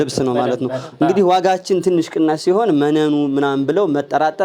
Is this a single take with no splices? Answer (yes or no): yes